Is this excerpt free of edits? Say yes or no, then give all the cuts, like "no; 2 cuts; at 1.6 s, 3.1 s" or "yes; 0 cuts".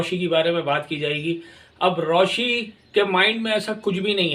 yes; 0 cuts